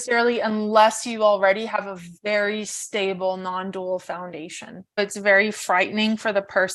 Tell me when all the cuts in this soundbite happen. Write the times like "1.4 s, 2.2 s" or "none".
5.0 s